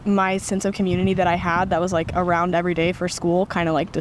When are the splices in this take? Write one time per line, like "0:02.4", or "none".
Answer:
none

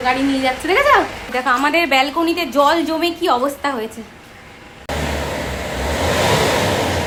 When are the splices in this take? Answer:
none

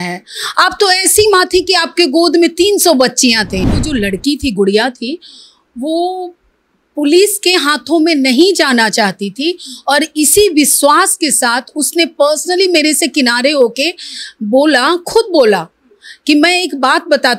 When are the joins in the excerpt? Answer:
0:03.8

